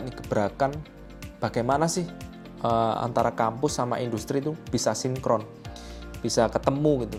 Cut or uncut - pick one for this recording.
uncut